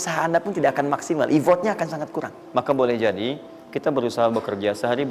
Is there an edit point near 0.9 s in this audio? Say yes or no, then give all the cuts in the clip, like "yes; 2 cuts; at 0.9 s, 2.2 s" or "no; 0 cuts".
no; 1 cut; at 2.4 s